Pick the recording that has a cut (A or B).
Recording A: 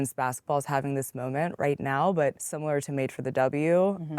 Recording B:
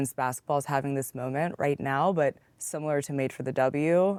A